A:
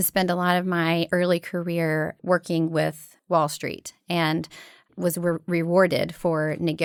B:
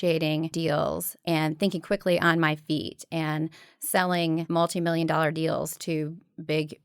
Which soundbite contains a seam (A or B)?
B